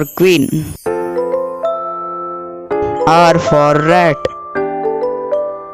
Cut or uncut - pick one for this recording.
uncut